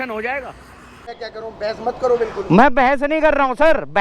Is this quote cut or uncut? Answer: cut